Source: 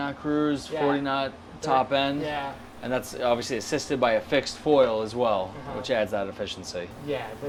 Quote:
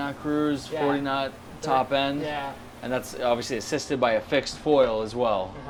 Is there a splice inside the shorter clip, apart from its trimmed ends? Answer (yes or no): no